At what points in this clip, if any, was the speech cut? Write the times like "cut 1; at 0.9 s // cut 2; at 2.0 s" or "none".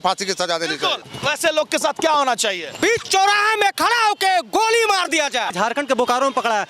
cut 1; at 1.1 s // cut 2; at 5.5 s